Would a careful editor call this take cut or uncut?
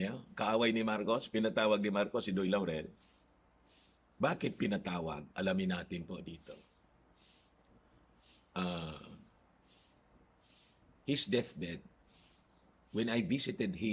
uncut